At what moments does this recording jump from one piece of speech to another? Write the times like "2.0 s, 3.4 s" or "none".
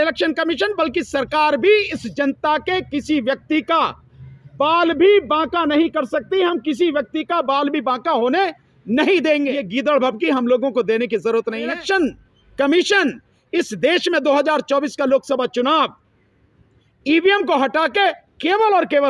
9.6 s, 11.8 s